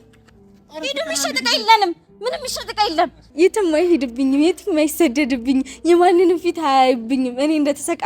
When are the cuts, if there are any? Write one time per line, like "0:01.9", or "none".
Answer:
0:03.2